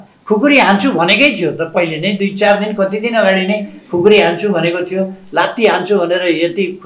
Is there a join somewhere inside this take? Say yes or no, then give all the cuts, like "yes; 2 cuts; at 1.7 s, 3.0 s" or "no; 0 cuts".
no; 0 cuts